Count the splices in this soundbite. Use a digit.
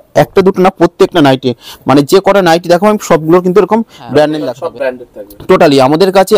1